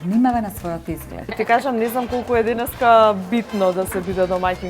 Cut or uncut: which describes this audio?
cut